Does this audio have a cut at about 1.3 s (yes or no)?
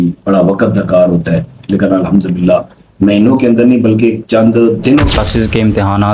no